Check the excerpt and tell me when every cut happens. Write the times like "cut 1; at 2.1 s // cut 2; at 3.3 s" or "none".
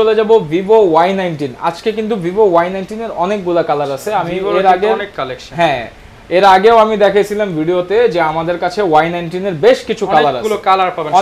none